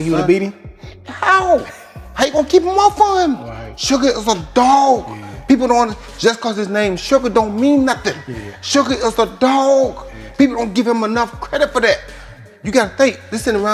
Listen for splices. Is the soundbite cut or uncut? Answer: uncut